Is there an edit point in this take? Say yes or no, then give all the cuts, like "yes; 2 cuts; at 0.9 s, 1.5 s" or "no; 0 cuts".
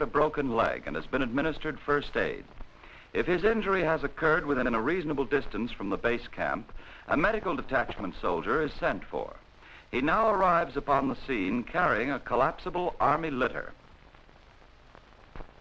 yes; 1 cut; at 8.6 s